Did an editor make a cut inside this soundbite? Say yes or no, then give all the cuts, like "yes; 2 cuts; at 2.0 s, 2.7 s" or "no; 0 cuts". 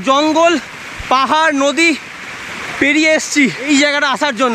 yes; 1 cut; at 3.7 s